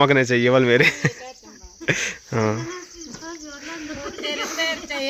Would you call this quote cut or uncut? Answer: uncut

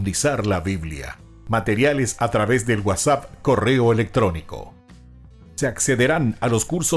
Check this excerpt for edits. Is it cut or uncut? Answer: uncut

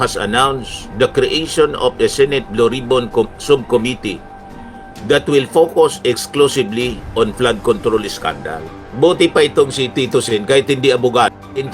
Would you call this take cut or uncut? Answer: cut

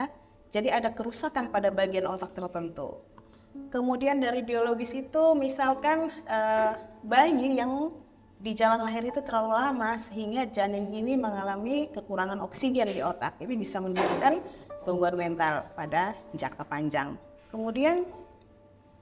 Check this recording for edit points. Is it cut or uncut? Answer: uncut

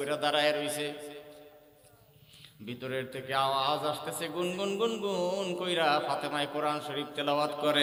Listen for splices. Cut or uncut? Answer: uncut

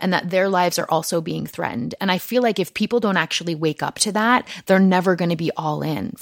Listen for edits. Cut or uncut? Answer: uncut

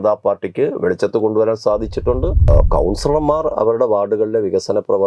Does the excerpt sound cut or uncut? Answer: cut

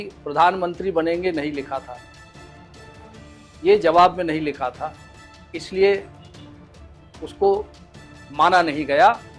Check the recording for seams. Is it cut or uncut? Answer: cut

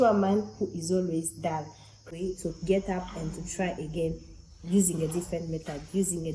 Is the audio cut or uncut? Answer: cut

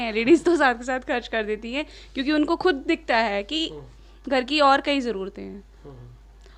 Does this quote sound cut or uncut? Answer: uncut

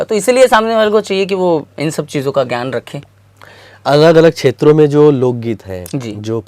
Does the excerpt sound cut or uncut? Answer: uncut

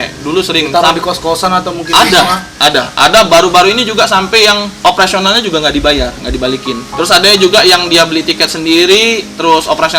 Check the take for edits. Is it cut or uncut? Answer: cut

